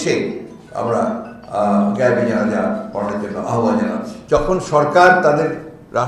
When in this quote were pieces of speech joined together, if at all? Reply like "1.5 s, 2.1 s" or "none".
4.1 s